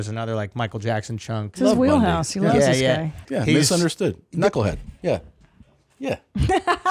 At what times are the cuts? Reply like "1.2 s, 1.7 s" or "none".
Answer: 1.5 s, 3.2 s